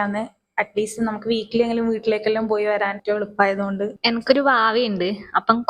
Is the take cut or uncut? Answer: cut